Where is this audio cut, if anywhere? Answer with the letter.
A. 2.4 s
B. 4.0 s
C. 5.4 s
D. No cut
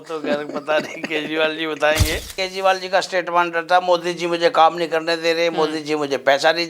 A